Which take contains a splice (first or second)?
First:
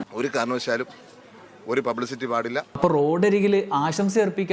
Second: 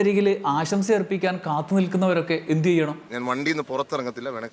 second